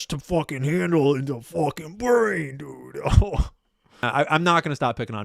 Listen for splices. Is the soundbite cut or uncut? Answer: cut